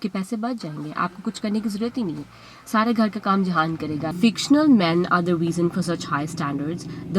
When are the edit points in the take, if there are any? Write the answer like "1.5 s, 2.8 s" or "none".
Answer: 4.1 s